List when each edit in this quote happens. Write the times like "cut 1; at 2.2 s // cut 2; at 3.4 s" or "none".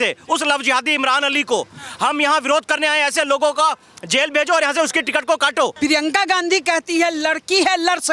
cut 1; at 5.7 s